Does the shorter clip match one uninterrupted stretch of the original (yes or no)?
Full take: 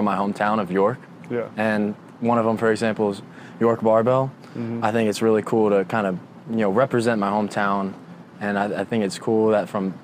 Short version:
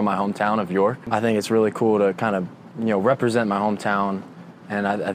no